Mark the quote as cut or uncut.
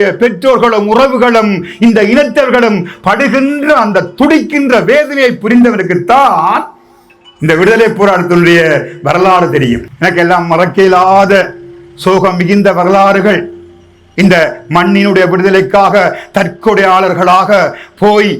cut